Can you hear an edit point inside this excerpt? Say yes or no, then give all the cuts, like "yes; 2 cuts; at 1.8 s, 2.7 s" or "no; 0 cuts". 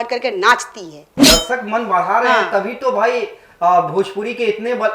yes; 1 cut; at 1.2 s